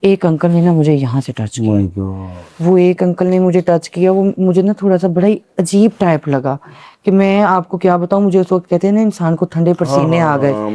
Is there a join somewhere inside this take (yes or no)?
no